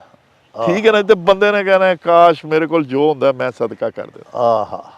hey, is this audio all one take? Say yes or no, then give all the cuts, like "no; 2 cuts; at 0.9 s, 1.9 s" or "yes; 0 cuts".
yes; 0 cuts